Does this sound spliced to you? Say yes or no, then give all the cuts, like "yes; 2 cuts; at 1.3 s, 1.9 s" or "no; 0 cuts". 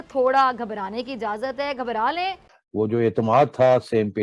yes; 1 cut; at 2.5 s